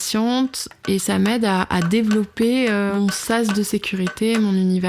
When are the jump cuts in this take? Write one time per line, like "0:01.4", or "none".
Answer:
0:02.9